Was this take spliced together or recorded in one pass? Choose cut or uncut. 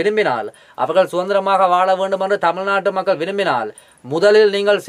uncut